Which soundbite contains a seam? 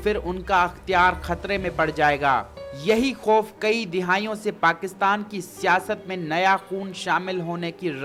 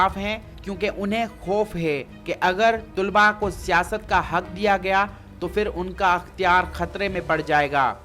second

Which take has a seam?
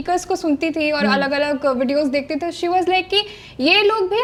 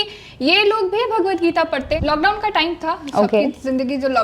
second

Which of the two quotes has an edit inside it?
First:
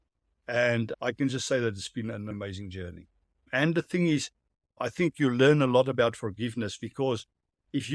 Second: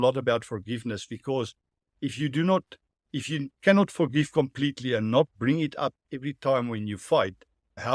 first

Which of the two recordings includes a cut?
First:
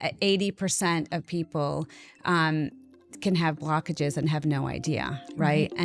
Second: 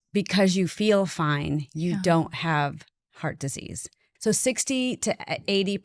second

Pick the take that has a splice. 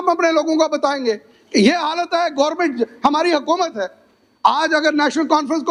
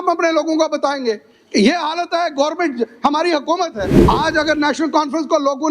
second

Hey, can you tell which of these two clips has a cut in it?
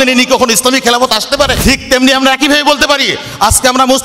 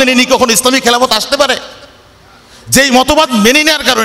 first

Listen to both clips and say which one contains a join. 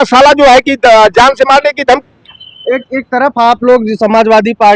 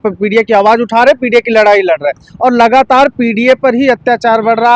first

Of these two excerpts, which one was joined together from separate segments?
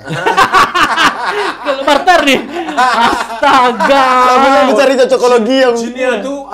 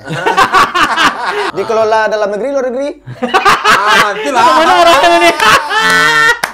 second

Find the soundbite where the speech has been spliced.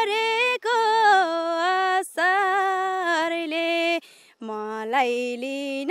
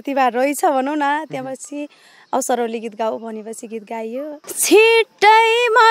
second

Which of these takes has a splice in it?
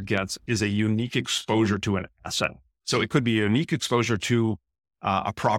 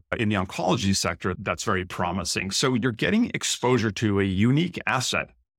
second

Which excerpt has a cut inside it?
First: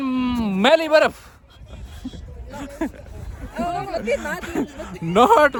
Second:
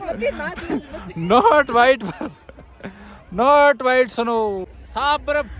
second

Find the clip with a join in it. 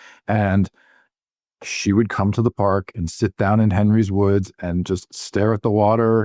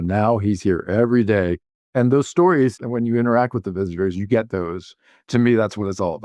second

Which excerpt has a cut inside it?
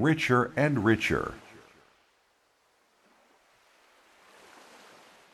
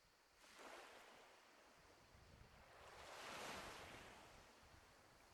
first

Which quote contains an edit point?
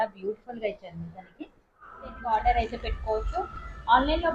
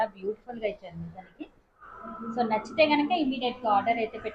first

